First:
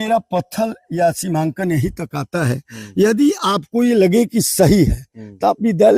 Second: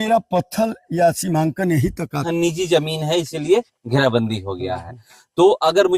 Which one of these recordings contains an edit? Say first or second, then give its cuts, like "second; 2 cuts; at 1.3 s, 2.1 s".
second; 1 cut; at 2.2 s